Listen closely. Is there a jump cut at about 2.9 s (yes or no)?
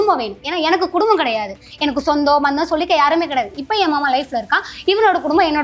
no